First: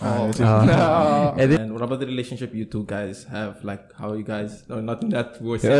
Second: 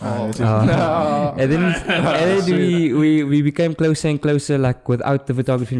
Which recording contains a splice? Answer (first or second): first